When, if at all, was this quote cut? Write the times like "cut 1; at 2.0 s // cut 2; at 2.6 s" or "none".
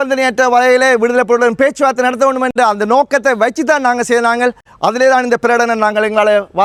none